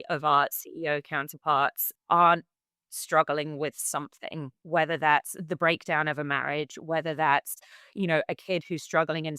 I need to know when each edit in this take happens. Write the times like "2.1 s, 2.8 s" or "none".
1.9 s, 4.6 s